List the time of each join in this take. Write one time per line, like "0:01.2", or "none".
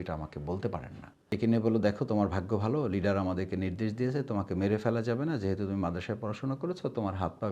0:01.3